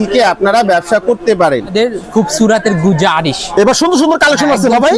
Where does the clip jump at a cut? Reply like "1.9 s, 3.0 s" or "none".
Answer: 1.7 s